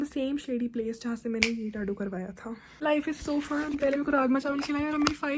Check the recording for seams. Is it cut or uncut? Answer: cut